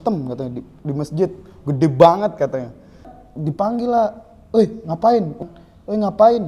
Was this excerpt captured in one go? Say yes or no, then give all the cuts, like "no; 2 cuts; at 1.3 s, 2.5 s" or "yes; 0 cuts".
no; 2 cuts; at 3.2 s, 5.4 s